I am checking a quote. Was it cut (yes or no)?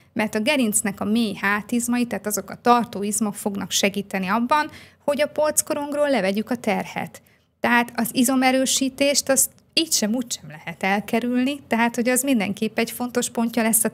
no